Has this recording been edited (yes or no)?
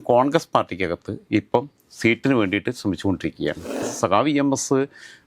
yes